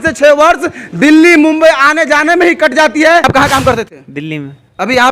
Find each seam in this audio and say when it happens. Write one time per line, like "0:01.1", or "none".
0:03.2